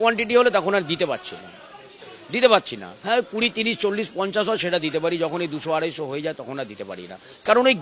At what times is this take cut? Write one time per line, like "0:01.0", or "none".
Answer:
none